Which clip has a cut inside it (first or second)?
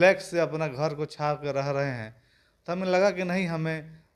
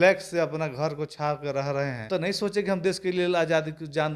second